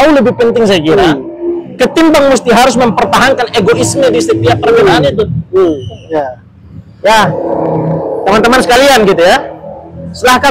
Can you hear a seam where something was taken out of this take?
no; 0 cuts

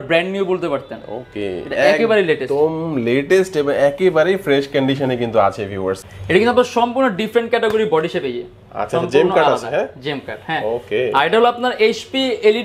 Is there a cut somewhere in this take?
yes; 1 cut; at 6.1 s

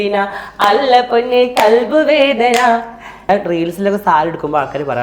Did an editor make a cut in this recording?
yes; 1 cut; at 3.3 s

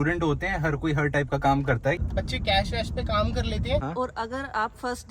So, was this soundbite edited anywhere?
yes; 2 cuts; at 2.0 s, 3.8 s

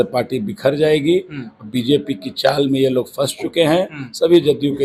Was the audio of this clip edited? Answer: no; 0 cuts

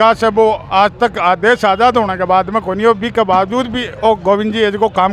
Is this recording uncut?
yes; 0 cuts

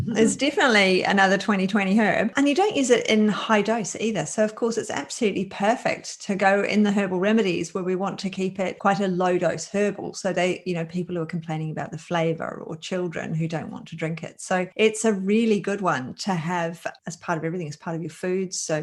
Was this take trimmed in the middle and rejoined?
no; 0 cuts

